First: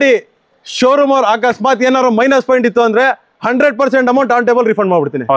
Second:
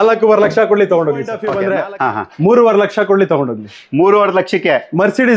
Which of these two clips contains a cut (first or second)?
second